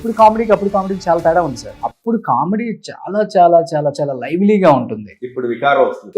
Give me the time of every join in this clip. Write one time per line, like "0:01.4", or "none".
0:01.7